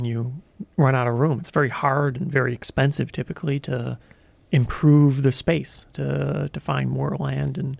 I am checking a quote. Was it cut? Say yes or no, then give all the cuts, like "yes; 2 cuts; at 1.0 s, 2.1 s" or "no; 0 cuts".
no; 0 cuts